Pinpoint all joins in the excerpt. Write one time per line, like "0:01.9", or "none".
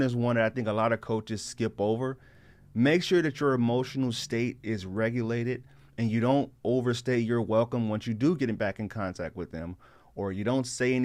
none